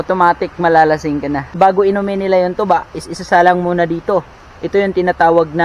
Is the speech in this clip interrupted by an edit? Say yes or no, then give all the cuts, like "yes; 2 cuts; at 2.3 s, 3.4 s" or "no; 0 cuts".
yes; 1 cut; at 1.5 s